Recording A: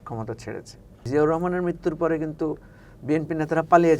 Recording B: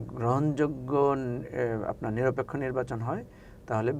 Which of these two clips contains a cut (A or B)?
A